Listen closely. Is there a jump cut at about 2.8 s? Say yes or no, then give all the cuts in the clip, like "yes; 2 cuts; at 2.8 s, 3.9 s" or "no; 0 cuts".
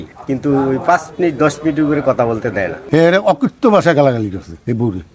yes; 1 cut; at 2.8 s